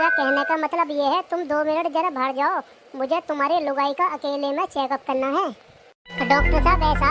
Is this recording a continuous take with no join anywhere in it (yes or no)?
yes